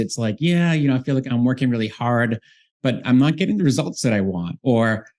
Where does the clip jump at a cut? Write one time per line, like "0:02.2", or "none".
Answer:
0:01.2
0:03.0